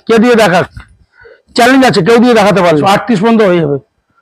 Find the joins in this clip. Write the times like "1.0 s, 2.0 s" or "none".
2.8 s